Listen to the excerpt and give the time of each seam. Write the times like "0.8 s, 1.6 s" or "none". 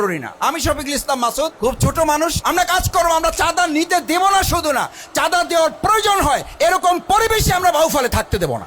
1.5 s, 2.4 s